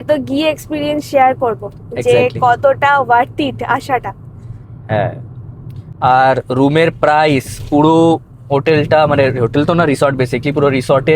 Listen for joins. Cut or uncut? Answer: uncut